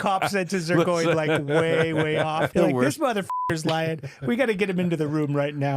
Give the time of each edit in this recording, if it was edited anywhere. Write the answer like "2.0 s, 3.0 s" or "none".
2.5 s